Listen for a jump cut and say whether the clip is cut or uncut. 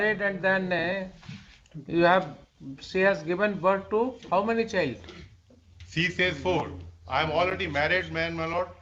uncut